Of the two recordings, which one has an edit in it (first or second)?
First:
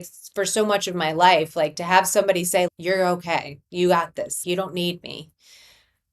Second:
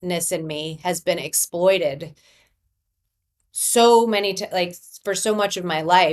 first